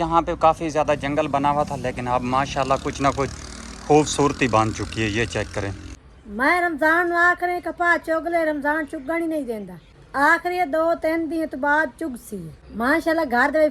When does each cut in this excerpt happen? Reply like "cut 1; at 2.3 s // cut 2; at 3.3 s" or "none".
none